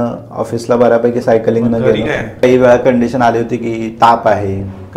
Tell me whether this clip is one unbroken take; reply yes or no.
no